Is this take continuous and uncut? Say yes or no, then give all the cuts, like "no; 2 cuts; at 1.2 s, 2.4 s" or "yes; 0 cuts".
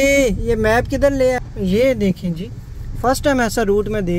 yes; 0 cuts